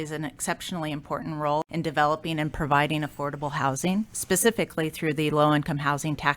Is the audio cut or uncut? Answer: cut